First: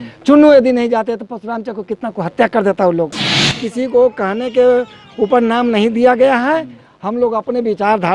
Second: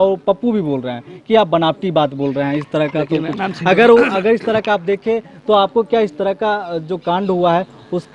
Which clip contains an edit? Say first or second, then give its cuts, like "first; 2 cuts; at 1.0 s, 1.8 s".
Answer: first; 1 cut; at 3.5 s